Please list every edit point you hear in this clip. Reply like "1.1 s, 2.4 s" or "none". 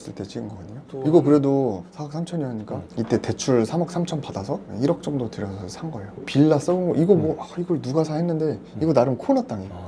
none